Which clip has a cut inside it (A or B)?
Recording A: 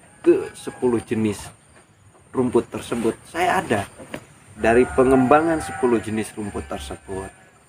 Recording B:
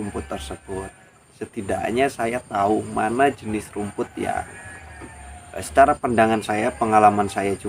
A